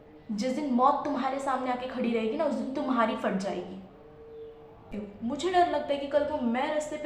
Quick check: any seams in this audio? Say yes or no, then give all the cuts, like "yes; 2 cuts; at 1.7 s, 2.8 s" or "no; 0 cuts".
yes; 1 cut; at 4.9 s